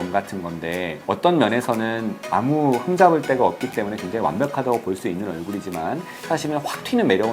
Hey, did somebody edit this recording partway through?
yes; 1 cut; at 0.9 s

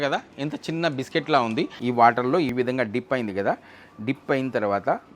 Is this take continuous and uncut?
no; 2 cuts; at 1.8 s, 2.5 s

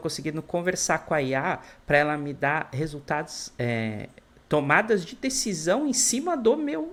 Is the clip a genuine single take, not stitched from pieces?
yes; 0 cuts

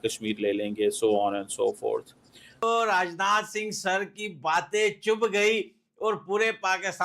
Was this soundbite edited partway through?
yes; 1 cut; at 2.6 s

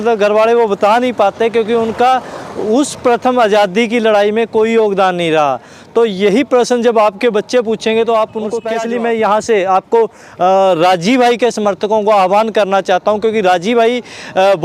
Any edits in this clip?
yes; 1 cut; at 8.6 s

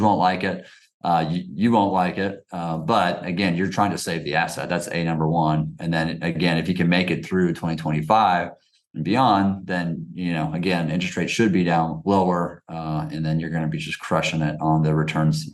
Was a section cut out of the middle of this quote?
no; 0 cuts

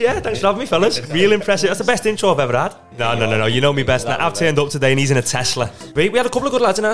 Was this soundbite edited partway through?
yes; 2 cuts; at 2.8 s, 5.9 s

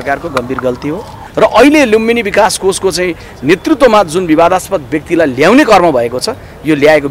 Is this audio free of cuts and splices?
no; 1 cut; at 1.2 s

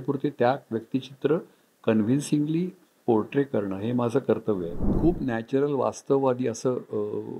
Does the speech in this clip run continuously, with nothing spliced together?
no; 1 cut; at 4.9 s

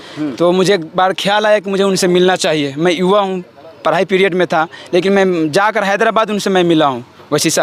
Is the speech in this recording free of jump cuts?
yes; 0 cuts

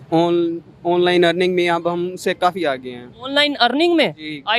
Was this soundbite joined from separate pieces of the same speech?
yes; 1 cut; at 3.3 s

